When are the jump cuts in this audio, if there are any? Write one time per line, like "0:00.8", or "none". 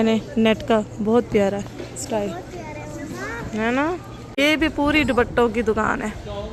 none